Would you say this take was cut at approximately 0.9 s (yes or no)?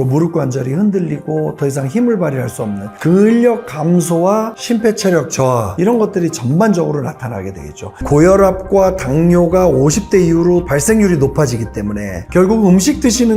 no